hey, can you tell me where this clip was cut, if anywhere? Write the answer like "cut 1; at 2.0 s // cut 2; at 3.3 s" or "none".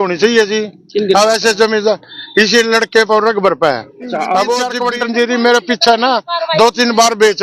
cut 1; at 4.8 s